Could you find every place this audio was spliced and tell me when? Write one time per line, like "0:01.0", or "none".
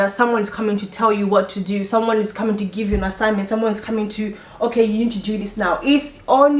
none